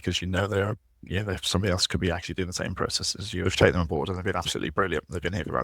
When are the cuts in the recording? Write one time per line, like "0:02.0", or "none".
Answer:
0:03.4

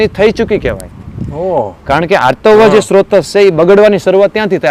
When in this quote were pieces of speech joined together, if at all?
none

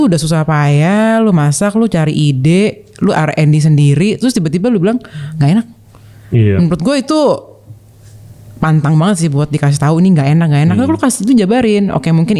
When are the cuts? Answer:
none

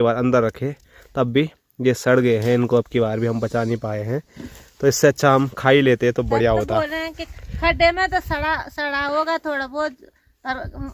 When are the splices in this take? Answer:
none

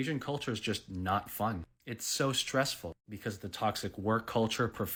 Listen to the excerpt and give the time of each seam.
none

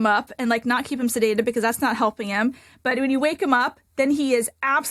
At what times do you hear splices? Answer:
none

